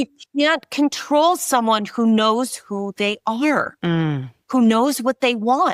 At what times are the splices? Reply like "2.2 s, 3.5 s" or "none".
none